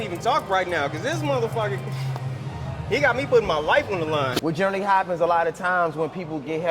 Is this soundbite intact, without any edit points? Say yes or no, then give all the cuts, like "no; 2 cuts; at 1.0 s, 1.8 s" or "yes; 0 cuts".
no; 1 cut; at 4.4 s